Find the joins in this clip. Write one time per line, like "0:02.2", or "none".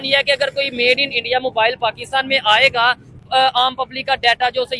0:03.2